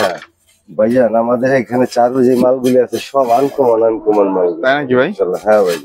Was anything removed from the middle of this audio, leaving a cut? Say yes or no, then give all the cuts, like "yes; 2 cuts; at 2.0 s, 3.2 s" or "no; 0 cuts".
no; 0 cuts